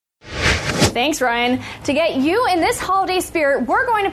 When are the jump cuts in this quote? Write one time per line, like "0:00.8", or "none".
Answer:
0:00.9